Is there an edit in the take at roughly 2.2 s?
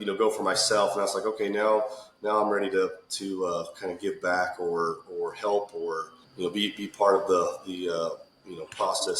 no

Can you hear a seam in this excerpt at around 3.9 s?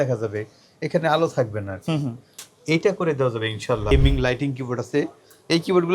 yes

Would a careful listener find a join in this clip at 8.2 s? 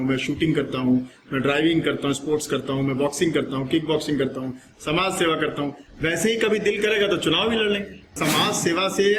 yes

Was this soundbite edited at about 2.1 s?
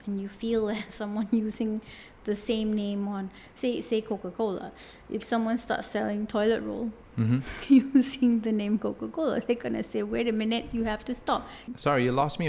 no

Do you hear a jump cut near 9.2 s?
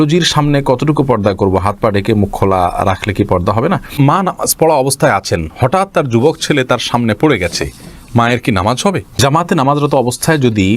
yes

